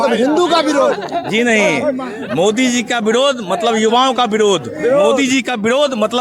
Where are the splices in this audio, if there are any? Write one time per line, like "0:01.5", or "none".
none